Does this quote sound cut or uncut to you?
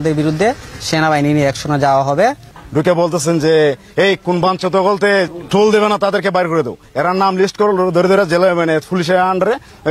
cut